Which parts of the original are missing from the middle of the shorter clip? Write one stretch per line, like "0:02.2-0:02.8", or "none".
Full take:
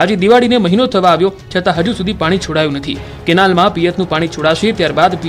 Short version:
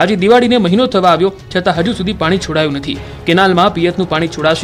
none